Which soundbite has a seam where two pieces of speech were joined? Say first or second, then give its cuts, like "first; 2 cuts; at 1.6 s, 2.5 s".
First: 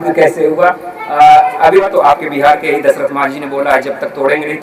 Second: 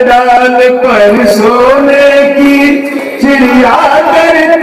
first; 1 cut; at 1.9 s